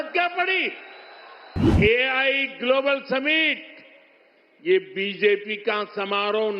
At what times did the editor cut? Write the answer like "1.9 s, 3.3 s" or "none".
1.7 s